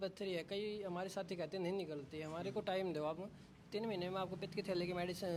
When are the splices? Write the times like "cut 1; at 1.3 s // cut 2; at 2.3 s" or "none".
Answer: none